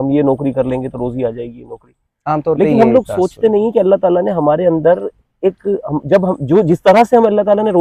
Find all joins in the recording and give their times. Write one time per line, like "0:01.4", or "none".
none